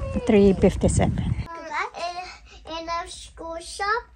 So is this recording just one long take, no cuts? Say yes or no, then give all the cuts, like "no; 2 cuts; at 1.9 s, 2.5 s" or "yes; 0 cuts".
no; 1 cut; at 1.5 s